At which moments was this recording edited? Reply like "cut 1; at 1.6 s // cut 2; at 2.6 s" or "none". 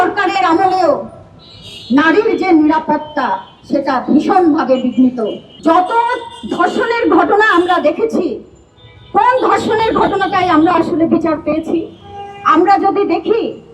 cut 1; at 5.4 s